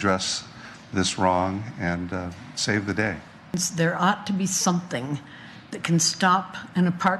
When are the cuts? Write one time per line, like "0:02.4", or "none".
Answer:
0:03.6